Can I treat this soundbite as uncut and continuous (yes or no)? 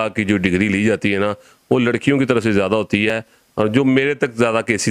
yes